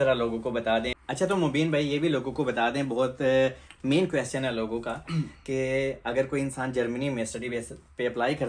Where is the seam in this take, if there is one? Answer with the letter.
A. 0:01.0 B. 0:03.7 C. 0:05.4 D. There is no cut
A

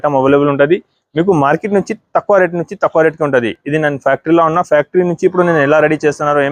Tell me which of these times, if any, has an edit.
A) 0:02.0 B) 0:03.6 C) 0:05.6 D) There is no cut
D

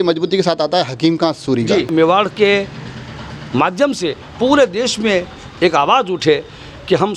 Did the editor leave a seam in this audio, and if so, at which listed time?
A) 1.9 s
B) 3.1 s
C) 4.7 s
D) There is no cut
A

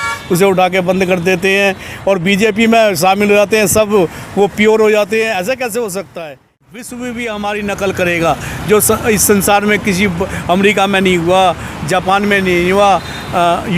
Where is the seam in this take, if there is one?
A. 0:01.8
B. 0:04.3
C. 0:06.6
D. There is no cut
C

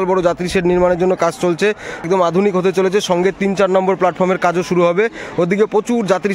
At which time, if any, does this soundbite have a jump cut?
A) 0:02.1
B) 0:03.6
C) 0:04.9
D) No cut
A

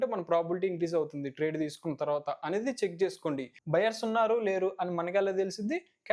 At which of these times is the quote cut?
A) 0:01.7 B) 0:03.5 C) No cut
B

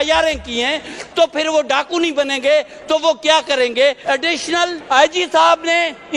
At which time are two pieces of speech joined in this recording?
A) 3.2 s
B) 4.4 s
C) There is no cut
B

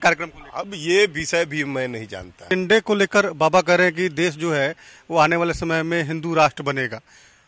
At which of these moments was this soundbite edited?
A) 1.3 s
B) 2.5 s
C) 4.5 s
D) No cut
B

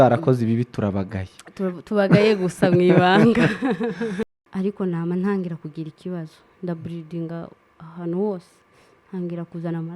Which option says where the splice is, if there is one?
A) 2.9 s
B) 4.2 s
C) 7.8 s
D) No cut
B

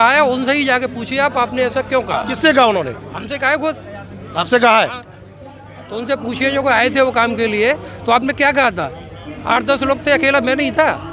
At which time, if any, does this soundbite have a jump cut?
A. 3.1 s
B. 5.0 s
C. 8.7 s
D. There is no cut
D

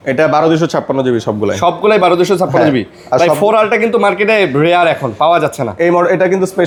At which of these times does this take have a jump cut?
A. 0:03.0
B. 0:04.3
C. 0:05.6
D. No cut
D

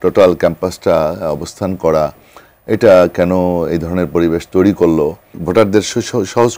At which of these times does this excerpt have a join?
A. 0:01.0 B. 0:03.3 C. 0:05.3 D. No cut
C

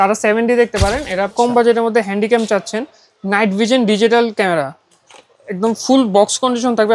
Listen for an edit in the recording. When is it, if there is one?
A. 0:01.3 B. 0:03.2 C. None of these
A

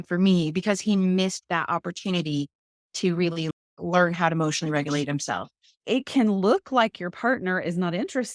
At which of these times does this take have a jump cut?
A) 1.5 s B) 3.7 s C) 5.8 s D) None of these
C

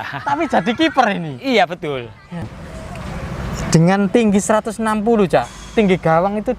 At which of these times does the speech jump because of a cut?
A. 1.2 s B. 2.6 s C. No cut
B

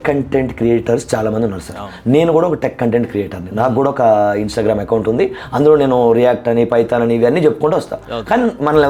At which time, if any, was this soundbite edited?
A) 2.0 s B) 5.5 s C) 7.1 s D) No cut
D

